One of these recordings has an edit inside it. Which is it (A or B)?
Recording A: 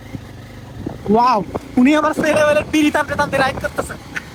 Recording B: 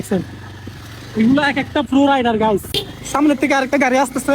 B